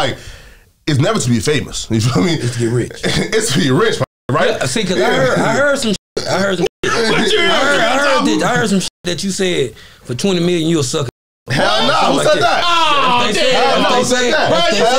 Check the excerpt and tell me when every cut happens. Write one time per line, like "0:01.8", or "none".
none